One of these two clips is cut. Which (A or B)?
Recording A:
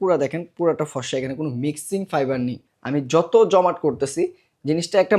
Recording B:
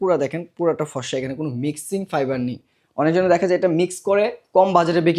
A